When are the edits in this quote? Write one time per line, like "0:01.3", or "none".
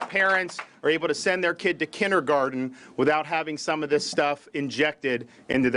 none